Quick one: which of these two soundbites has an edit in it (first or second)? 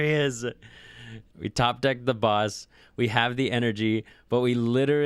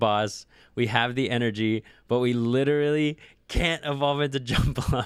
first